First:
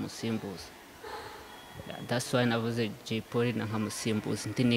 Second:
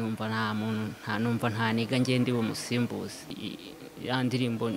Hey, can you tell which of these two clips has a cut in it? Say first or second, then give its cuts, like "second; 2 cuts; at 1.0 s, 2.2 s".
second; 1 cut; at 3.2 s